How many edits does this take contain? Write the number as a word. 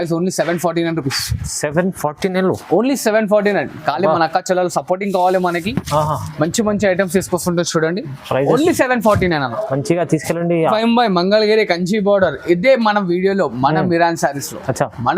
one